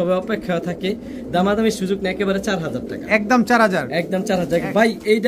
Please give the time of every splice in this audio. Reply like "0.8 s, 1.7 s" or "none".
none